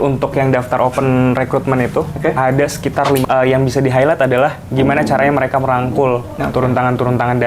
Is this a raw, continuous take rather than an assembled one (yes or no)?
no